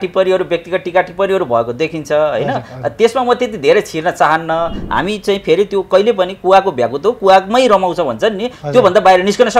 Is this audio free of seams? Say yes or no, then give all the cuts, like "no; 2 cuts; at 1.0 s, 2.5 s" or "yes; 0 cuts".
no; 1 cut; at 4.8 s